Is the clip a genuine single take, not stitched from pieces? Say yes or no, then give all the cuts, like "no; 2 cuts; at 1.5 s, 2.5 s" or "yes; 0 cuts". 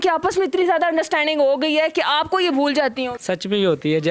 no; 1 cut; at 3.2 s